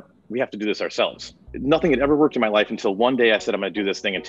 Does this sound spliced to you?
no; 0 cuts

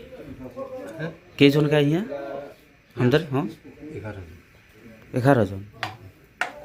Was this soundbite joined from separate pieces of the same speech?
no; 0 cuts

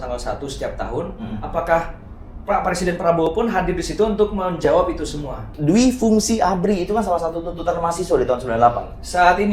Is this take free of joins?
no; 1 cut; at 5.5 s

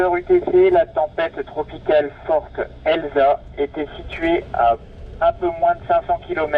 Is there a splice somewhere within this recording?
no; 0 cuts

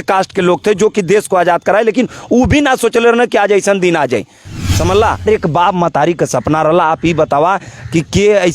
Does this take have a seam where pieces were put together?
yes; 1 cut; at 5.3 s

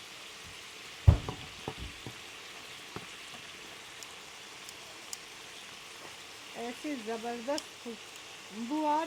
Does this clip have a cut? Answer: no; 0 cuts

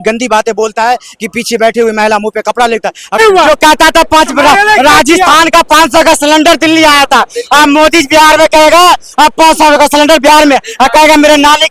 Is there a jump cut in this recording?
yes; 1 cut; at 3.2 s

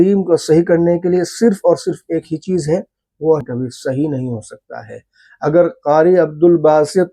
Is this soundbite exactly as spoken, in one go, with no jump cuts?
no; 1 cut; at 3.4 s

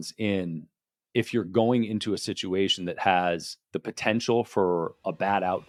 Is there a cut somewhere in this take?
no; 0 cuts

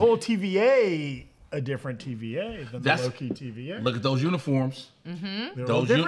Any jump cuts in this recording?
no; 0 cuts

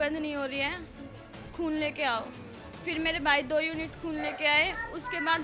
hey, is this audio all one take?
yes; 0 cuts

